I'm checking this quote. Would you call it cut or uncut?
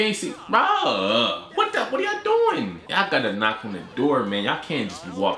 cut